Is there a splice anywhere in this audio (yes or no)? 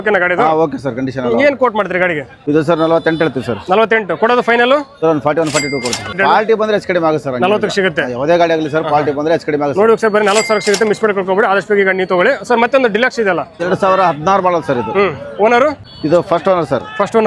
yes